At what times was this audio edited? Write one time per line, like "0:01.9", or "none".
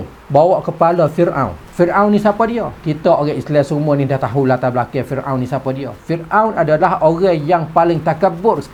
none